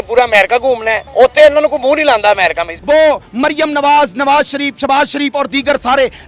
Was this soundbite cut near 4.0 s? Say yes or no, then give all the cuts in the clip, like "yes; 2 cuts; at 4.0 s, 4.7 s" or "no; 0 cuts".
no; 2 cuts; at 1.0 s, 2.7 s